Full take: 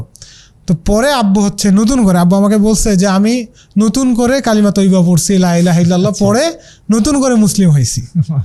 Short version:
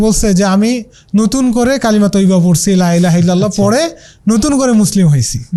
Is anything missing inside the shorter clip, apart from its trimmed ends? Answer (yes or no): no